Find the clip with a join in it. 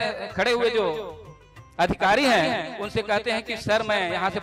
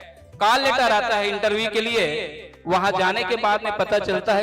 second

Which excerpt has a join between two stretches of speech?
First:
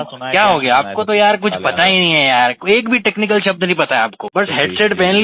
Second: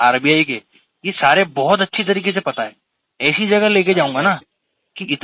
first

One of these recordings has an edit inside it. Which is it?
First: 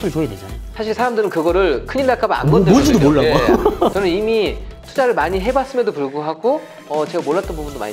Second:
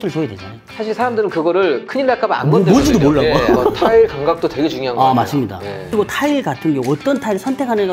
second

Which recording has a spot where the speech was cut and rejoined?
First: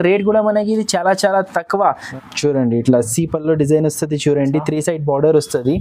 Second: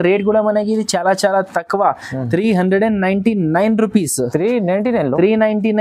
first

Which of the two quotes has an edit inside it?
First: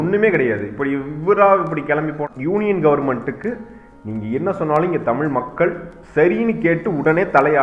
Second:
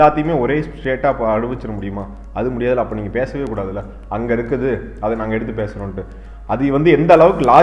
first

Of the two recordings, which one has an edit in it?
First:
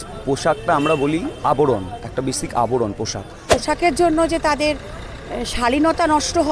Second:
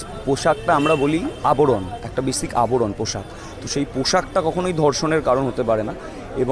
first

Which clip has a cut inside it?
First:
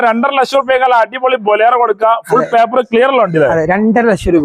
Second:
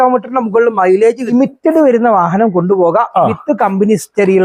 second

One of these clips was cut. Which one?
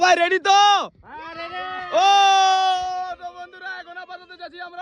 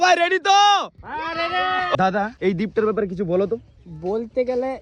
second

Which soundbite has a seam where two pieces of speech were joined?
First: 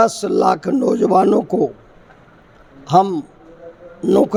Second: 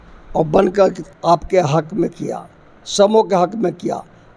second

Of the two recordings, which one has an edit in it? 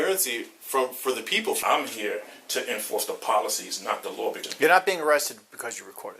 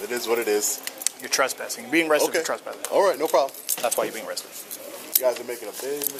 first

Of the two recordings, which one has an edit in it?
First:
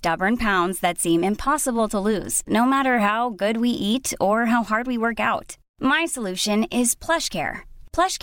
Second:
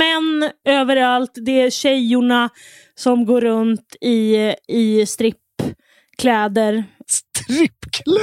second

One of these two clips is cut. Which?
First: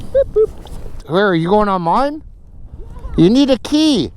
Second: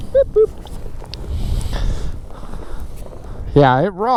first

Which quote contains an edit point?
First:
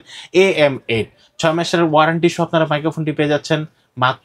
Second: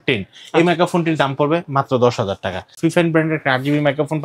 second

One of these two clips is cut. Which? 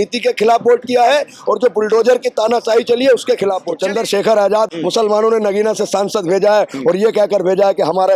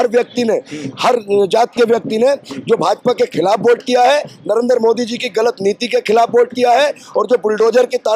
first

